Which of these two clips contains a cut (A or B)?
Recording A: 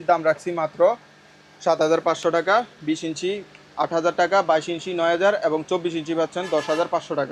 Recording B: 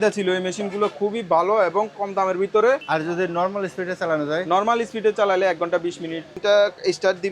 B